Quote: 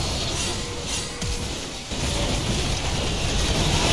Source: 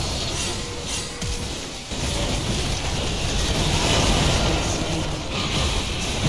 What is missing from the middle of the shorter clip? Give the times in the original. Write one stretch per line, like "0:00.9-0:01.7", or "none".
none